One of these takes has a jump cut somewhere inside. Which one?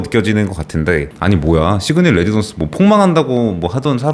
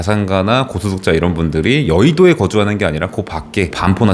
first; 1 cut; at 1.1 s

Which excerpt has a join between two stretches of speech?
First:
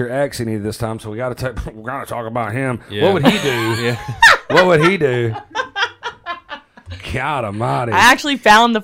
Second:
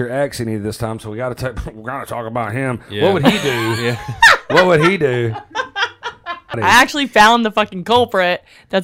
second; 1 cut; at 6.6 s

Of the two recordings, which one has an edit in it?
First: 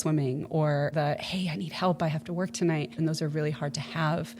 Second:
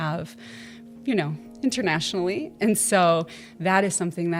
first; 2 cuts; at 0.9 s, 3.0 s

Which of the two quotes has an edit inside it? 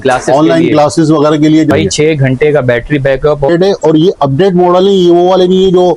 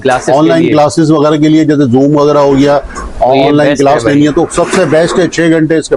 first; 2 cuts; at 1.7 s, 3.5 s

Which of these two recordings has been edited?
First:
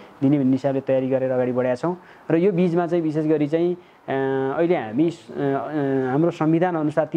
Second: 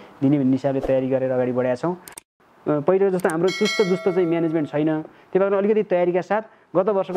second; 1 cut; at 2.2 s

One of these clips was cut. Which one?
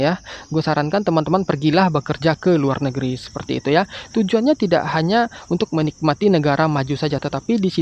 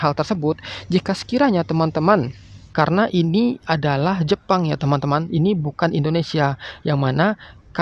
second; 1 cut; at 2.6 s

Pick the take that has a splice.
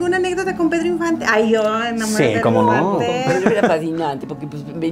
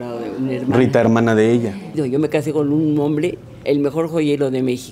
second; 2 cuts; at 1.9 s, 3.6 s

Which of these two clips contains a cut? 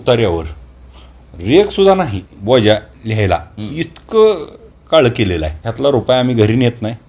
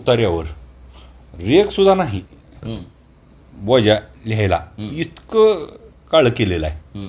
first; 2 cuts; at 2.3 s, 5.6 s

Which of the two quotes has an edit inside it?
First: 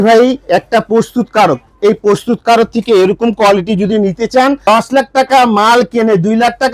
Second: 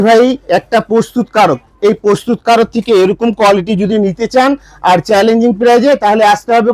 first; 1 cut; at 4.6 s

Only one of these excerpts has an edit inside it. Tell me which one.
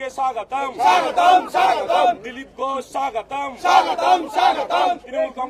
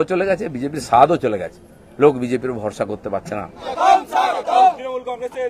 second; 1 cut; at 3.7 s

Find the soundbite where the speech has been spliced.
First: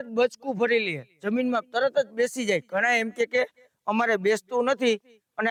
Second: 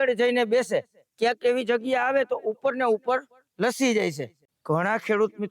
second; 1 cut; at 4.4 s

